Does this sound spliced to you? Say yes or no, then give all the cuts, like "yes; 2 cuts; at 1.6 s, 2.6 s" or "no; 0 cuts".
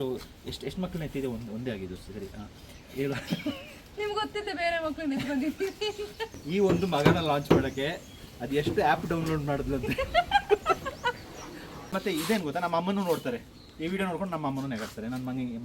yes; 2 cuts; at 6.4 s, 11.9 s